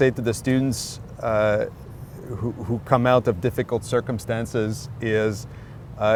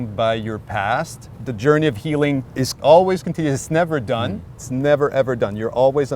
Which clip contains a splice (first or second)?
second